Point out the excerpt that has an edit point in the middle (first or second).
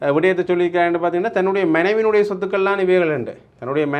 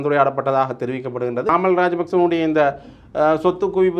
second